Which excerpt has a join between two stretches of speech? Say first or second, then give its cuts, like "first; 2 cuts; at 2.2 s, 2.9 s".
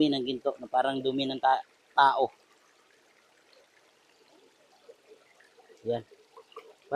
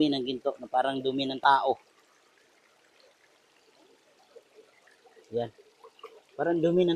second; 1 cut; at 1.3 s